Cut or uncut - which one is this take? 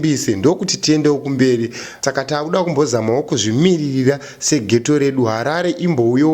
cut